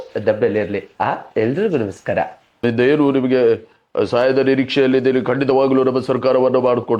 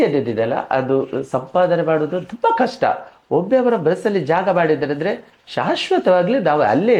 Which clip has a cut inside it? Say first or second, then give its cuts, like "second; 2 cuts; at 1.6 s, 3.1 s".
first; 1 cut; at 2.6 s